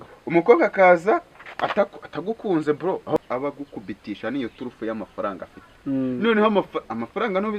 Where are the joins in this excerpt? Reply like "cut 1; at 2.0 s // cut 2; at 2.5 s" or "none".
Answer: cut 1; at 3.2 s